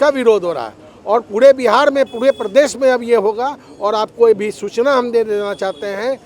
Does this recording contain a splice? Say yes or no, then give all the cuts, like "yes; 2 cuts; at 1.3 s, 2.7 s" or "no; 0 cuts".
no; 0 cuts